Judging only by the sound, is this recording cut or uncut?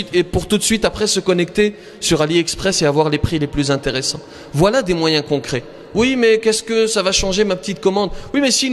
uncut